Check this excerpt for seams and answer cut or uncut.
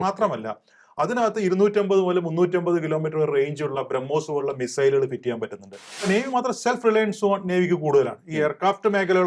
cut